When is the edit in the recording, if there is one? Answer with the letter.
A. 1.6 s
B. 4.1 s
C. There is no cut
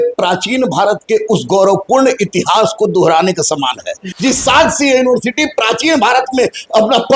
B